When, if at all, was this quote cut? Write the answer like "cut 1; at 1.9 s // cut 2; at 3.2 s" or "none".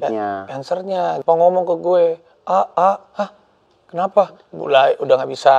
cut 1; at 1.2 s // cut 2; at 4.5 s